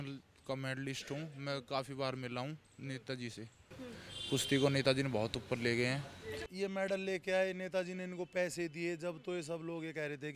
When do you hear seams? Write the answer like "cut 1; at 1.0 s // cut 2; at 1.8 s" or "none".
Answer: cut 1; at 3.6 s // cut 2; at 6.5 s

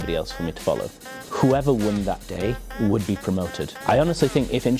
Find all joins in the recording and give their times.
cut 1; at 1.1 s // cut 2; at 3.7 s

